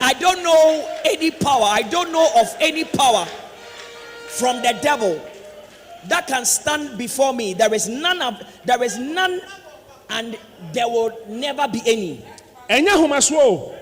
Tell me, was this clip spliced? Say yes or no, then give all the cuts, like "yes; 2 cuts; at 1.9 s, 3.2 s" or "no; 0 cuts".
no; 0 cuts